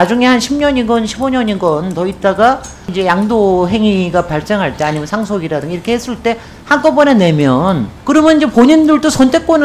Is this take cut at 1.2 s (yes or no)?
no